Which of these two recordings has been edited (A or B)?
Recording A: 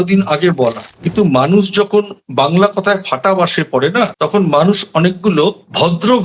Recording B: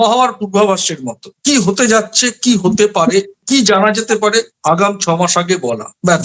A